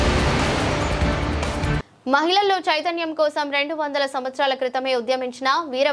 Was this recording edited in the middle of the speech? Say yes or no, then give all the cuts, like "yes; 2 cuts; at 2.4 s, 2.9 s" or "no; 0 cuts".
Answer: yes; 1 cut; at 1.8 s